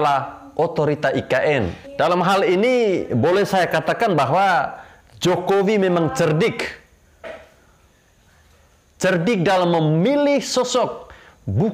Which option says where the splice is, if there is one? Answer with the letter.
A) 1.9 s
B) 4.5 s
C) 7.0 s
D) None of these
A